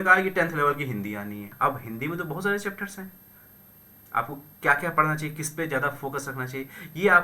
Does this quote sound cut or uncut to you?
cut